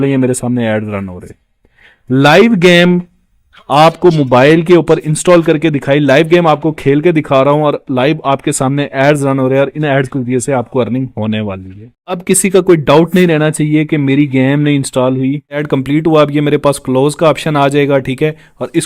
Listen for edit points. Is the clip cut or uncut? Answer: uncut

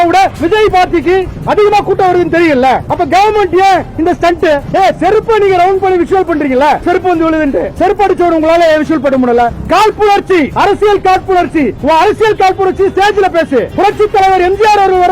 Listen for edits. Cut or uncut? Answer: cut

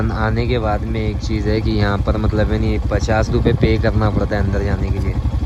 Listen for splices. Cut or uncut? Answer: uncut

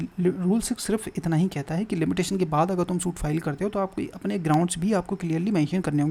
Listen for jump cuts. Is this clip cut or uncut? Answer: uncut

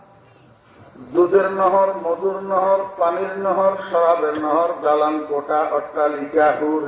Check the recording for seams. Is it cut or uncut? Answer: uncut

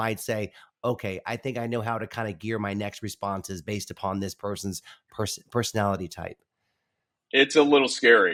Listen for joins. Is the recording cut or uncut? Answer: uncut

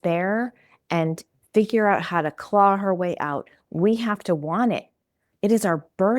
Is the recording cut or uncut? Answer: uncut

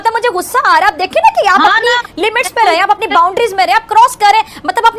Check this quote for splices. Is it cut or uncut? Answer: uncut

